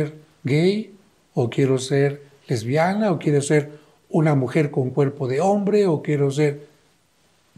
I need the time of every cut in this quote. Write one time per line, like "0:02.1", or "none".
none